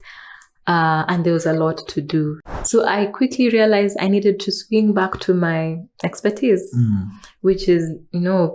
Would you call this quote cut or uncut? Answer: cut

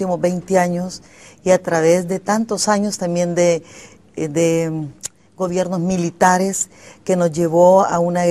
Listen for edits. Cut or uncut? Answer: uncut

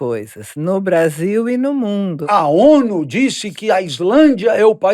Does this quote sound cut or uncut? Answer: cut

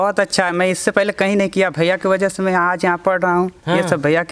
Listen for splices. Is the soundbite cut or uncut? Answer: uncut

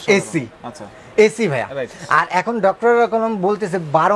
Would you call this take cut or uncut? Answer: uncut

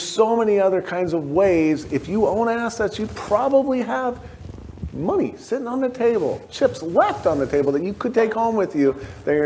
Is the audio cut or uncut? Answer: uncut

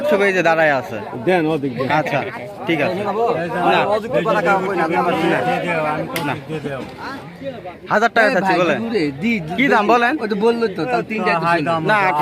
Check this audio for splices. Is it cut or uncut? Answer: cut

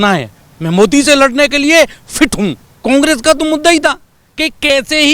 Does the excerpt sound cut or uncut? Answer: cut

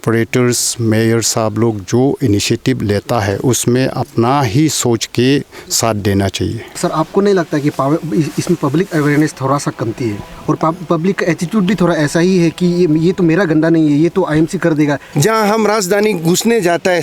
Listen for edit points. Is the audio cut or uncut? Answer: cut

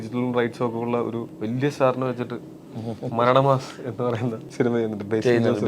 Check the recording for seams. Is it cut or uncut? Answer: cut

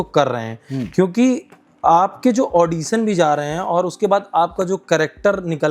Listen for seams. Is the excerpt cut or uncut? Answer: uncut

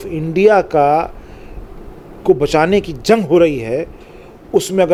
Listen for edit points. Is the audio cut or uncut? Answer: uncut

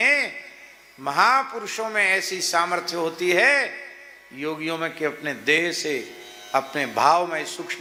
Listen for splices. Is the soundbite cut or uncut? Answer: uncut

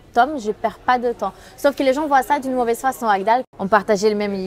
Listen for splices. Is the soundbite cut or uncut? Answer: cut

